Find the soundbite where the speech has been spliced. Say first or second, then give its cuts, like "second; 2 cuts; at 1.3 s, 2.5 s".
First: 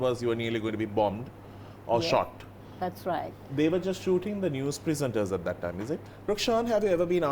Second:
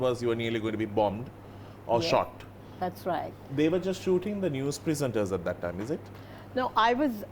first; 1 cut; at 6.1 s